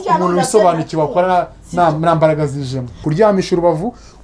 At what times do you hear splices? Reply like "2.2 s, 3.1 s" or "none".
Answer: 3.0 s